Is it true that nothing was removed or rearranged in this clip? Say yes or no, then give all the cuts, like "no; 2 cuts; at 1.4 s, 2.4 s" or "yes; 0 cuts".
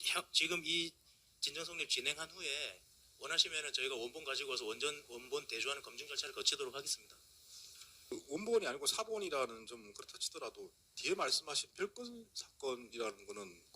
no; 1 cut; at 8.1 s